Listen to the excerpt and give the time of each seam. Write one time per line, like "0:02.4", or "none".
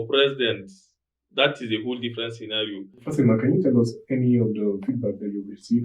0:03.1